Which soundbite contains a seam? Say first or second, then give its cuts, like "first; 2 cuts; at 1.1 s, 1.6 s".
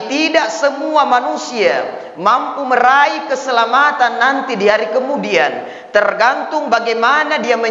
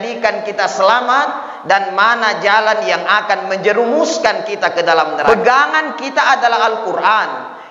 second; 1 cut; at 5.3 s